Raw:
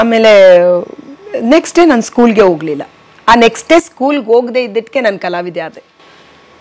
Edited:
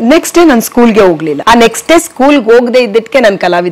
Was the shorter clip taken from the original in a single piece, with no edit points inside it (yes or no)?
no